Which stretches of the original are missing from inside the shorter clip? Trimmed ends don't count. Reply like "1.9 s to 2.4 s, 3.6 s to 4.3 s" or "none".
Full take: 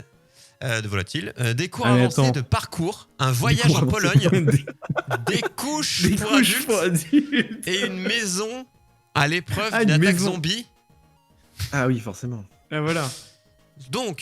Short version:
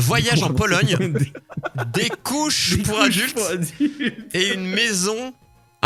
none